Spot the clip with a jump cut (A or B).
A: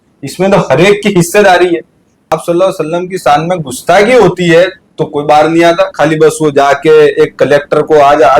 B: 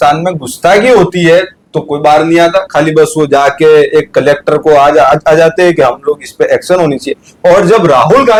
A